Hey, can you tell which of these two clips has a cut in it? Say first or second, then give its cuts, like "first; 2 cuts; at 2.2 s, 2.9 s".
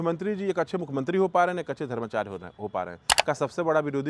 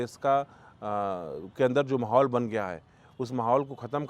first; 1 cut; at 3.1 s